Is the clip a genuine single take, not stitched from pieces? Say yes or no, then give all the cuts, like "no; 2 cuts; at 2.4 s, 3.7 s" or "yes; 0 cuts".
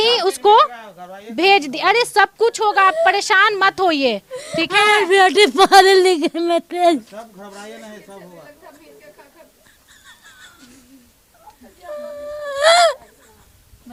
yes; 0 cuts